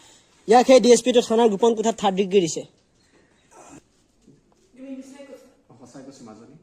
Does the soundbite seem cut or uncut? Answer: cut